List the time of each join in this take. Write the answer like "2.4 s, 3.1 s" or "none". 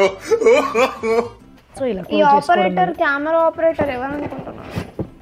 1.4 s

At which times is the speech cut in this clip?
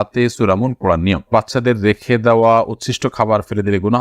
1.3 s

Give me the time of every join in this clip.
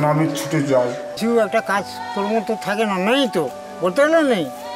1.1 s

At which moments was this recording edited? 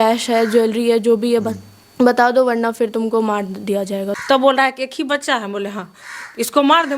4.2 s

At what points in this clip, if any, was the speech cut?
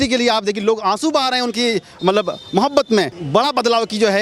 3.2 s

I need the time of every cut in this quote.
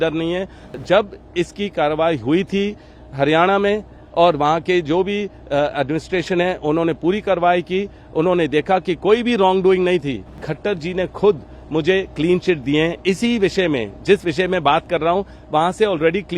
0.8 s, 10.4 s

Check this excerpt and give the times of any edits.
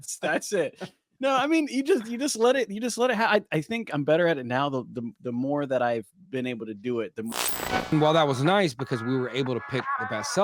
7.6 s

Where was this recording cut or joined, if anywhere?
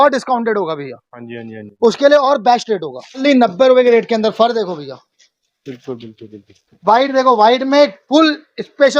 3.2 s

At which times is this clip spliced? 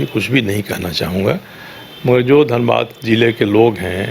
none

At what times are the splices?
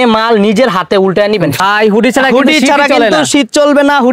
1.6 s

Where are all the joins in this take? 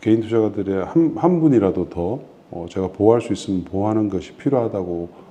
none

